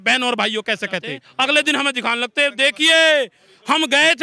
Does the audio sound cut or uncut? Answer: cut